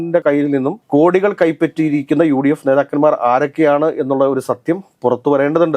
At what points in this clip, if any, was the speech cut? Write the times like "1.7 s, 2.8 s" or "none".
none